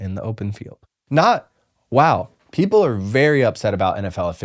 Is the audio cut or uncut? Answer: cut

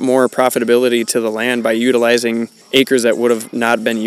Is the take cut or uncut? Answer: cut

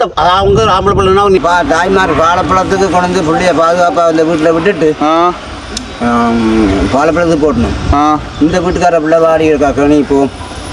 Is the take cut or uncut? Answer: cut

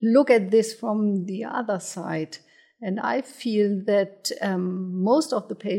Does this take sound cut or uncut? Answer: uncut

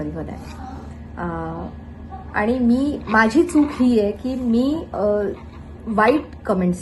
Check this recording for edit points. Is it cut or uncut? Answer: uncut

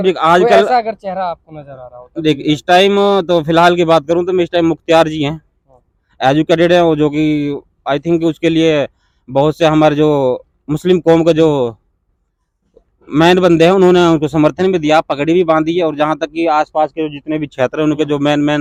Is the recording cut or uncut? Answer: uncut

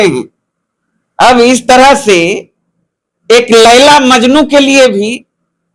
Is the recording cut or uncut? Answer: uncut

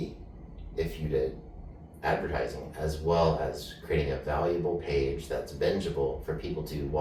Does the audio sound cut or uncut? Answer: uncut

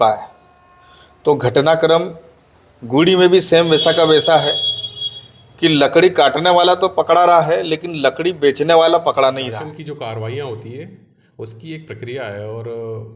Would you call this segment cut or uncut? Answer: cut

